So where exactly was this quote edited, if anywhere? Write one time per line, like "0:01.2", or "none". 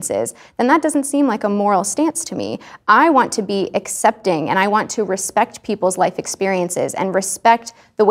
0:02.7